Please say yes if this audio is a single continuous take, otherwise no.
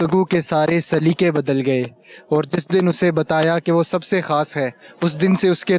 yes